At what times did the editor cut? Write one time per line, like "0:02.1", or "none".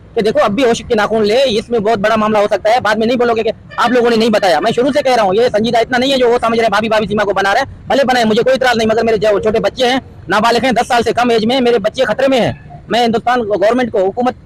none

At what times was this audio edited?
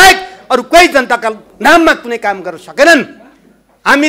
none

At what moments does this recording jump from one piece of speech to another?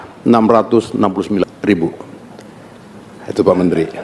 0:01.4

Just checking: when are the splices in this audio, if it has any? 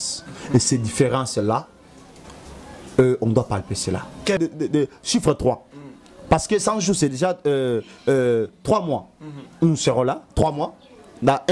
0:04.4

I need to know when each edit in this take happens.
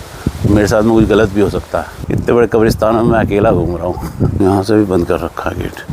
0:02.0
0:04.3

